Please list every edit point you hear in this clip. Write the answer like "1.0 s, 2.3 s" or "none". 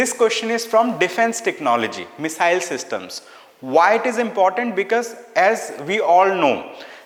none